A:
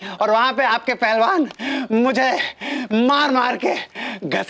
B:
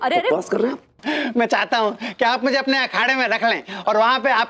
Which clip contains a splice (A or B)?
B